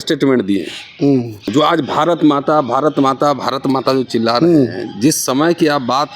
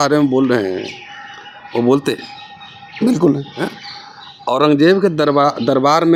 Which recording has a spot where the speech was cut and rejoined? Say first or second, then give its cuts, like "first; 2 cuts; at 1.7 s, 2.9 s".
first; 1 cut; at 1.5 s